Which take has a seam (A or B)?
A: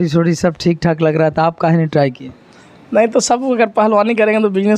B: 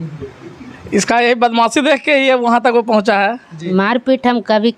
B